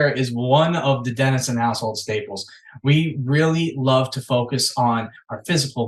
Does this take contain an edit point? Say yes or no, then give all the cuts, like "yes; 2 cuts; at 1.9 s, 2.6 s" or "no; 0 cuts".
no; 0 cuts